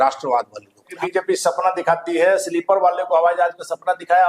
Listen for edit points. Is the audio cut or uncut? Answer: cut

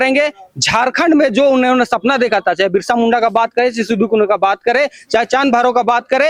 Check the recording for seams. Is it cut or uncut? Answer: uncut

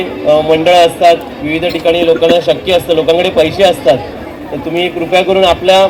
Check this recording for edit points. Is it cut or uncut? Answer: uncut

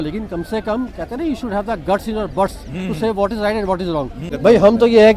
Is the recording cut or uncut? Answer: cut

